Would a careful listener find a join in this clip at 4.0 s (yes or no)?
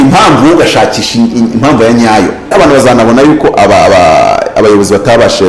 no